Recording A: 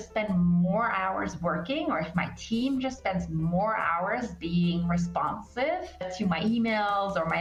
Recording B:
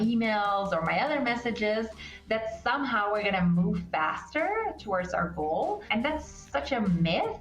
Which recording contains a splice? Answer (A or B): B